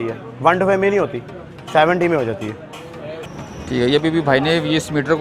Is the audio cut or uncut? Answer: cut